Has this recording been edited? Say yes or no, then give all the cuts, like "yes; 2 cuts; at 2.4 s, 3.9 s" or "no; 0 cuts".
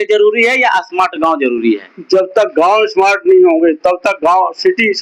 no; 0 cuts